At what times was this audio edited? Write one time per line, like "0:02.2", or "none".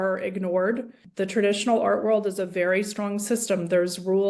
0:01.0